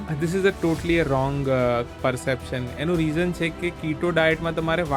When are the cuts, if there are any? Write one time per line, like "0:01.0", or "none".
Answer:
none